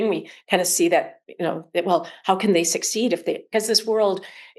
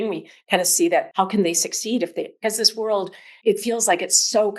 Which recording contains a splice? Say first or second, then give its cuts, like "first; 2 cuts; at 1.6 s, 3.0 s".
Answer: second; 2 cuts; at 1.1 s, 3.3 s